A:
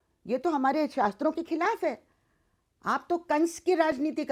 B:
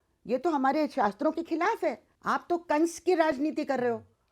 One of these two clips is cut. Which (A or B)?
B